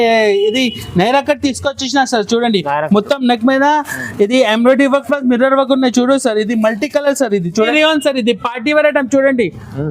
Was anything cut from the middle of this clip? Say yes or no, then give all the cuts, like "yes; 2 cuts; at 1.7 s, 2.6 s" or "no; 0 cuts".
yes; 1 cut; at 7.7 s